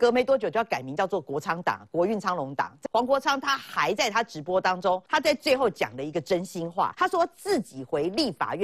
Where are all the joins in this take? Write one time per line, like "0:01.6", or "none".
0:02.8
0:05.0
0:06.9